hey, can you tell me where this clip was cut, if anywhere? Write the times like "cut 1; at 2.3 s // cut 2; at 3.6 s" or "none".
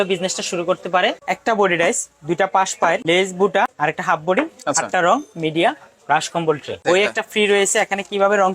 cut 1; at 1.3 s // cut 2; at 3.0 s // cut 3; at 3.7 s // cut 4; at 6.8 s